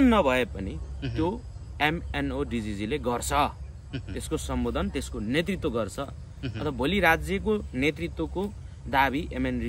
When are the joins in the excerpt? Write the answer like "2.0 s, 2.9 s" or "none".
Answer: none